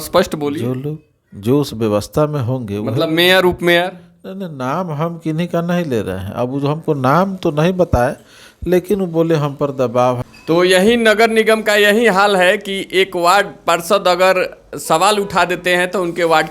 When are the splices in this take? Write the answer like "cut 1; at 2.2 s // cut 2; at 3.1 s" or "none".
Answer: cut 1; at 10.3 s